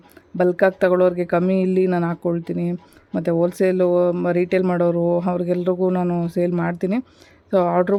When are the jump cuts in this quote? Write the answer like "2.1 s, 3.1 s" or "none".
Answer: none